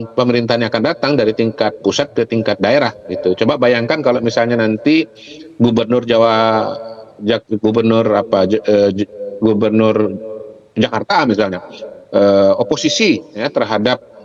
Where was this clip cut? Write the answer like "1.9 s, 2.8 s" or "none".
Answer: none